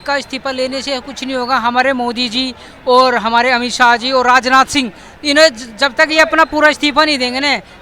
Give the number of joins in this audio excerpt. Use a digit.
0